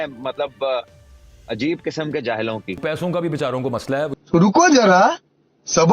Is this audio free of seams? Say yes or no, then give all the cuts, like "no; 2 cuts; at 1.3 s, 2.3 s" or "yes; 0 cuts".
no; 2 cuts; at 2.8 s, 4.1 s